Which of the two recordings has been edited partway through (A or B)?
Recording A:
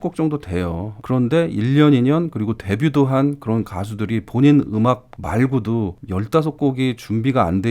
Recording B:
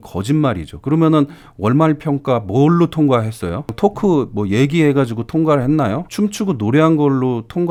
A